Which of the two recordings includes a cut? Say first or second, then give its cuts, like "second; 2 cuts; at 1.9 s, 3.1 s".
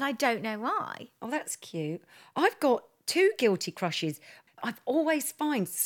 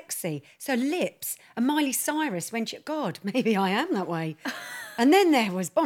first; 1 cut; at 4.4 s